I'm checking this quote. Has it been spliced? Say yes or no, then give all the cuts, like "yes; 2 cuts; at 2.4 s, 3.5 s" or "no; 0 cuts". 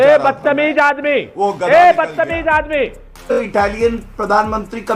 yes; 1 cut; at 3.4 s